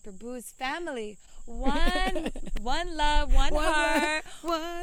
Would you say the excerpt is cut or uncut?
uncut